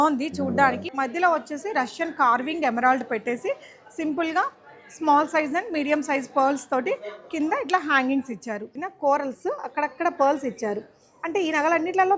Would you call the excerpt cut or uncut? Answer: cut